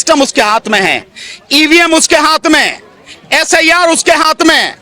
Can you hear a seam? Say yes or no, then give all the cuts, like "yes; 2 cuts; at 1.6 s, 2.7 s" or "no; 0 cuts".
no; 0 cuts